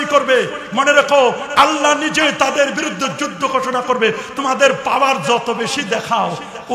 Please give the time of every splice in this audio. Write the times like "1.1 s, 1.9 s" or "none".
none